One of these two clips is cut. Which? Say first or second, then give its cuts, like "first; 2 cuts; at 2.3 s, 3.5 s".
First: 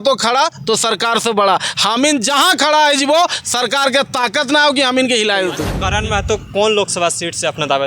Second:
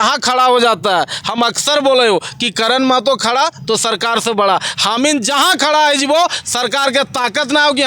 first; 1 cut; at 5.9 s